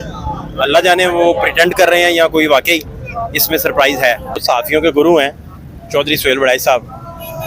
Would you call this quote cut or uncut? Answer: cut